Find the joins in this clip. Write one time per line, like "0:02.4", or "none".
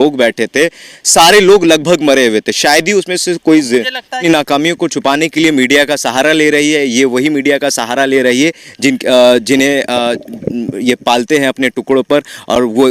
0:04.2